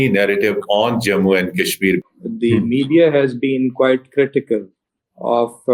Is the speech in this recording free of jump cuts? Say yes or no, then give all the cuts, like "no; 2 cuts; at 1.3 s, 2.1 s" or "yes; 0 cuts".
no; 1 cut; at 2.0 s